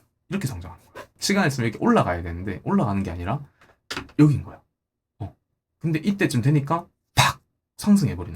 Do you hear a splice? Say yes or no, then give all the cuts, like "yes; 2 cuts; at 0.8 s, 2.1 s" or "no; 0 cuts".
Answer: yes; 1 cut; at 1.1 s